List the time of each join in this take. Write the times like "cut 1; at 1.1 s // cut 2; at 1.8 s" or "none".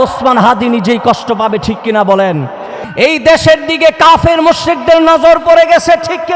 cut 1; at 2.8 s